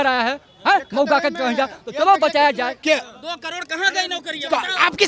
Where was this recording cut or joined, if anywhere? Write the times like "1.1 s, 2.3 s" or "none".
2.7 s